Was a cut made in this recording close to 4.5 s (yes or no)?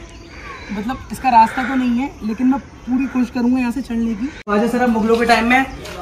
yes